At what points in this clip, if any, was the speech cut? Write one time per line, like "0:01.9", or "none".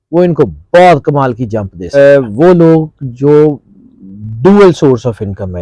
0:01.9